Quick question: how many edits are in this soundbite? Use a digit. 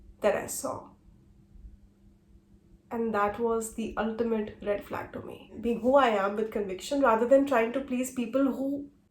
1